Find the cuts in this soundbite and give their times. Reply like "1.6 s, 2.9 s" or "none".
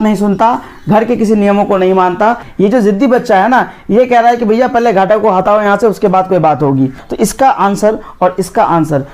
2.5 s, 7.0 s